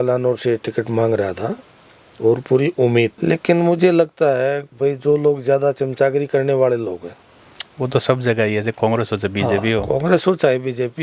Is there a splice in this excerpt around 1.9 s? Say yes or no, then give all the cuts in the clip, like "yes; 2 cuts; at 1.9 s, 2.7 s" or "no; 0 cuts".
no; 1 cut; at 3.2 s